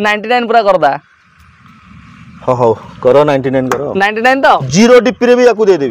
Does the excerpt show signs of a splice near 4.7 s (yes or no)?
yes